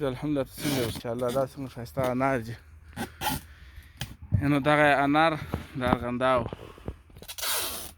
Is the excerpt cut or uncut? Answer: cut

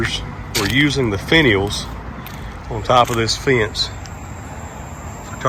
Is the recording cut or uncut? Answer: uncut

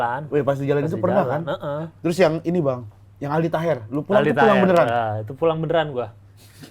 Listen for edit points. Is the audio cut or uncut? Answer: cut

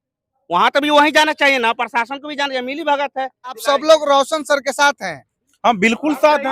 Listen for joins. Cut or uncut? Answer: cut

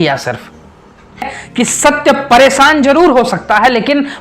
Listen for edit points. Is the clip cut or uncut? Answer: cut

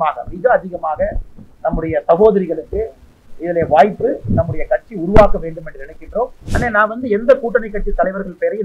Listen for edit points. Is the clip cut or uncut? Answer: cut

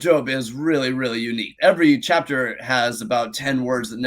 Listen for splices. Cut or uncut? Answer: cut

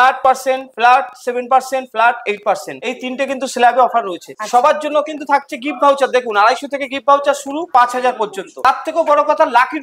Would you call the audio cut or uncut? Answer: uncut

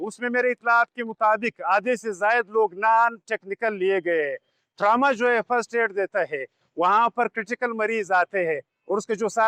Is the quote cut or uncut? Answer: uncut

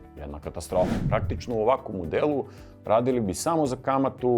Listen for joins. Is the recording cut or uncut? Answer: cut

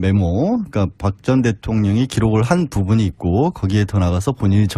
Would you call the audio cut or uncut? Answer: cut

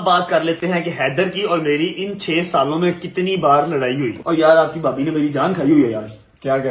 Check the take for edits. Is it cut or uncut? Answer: cut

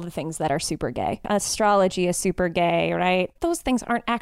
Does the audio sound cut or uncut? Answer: cut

